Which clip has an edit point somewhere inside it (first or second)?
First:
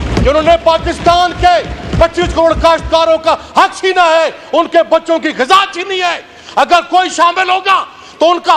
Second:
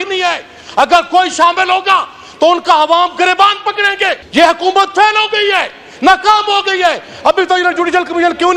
second